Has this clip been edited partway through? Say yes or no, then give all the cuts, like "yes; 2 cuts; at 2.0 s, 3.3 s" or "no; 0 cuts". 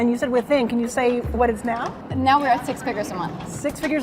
yes; 1 cut; at 2.0 s